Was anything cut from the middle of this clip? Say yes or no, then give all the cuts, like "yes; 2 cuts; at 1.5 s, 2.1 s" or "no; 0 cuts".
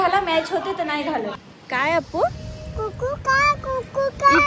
yes; 1 cut; at 1.5 s